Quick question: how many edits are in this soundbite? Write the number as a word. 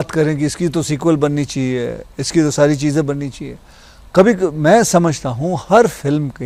zero